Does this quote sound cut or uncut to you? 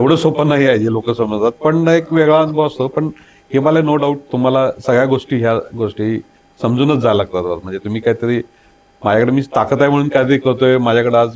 uncut